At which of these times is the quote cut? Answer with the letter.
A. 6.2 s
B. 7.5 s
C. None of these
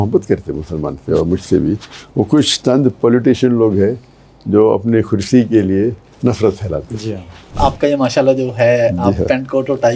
B